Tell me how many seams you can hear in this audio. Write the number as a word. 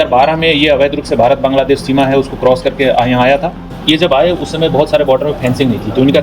one